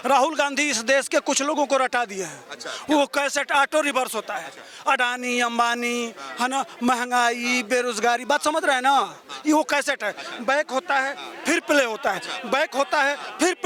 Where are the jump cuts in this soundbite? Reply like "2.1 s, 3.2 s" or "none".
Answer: none